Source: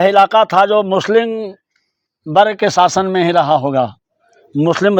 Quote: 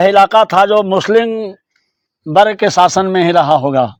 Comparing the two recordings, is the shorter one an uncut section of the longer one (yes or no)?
yes